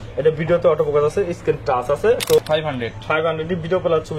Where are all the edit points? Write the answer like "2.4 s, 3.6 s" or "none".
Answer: 2.4 s